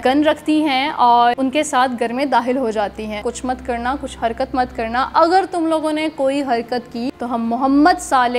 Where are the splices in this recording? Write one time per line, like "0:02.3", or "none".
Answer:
0:01.4
0:03.2
0:07.1